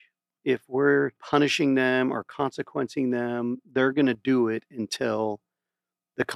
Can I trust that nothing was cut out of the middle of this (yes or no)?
no